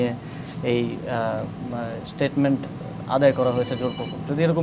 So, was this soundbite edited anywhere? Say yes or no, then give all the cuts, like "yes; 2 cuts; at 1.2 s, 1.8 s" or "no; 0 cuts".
no; 0 cuts